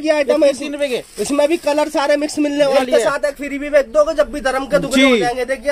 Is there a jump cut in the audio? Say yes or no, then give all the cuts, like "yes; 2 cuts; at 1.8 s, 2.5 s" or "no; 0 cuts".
yes; 1 cut; at 2.8 s